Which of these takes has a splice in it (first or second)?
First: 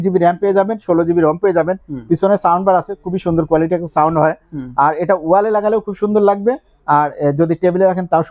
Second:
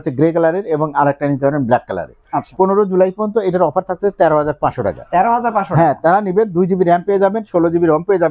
second